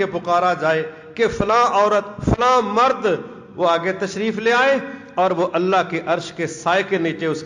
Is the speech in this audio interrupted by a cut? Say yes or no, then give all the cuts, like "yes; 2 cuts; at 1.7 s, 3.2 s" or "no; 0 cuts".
no; 0 cuts